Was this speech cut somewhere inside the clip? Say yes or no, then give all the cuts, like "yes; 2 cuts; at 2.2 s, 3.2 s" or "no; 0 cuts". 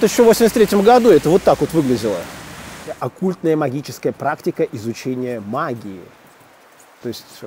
yes; 1 cut; at 3.0 s